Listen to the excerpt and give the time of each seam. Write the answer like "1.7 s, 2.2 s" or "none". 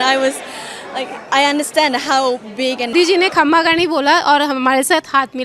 2.9 s